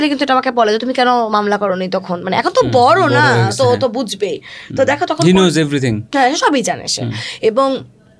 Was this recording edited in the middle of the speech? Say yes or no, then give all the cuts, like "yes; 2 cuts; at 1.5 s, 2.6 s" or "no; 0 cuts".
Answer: no; 0 cuts